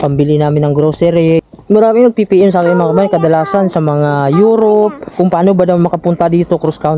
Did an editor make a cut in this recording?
yes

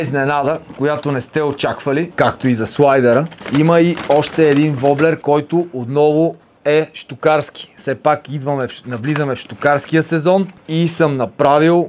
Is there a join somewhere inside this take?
yes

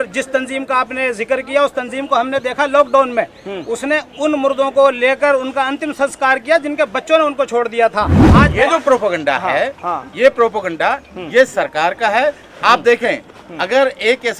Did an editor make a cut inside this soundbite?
yes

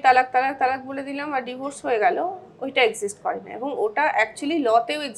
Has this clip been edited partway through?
no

